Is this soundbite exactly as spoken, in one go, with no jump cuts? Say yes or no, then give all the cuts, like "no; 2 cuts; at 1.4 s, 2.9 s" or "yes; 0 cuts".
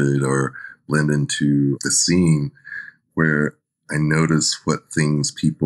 no; 1 cut; at 1.8 s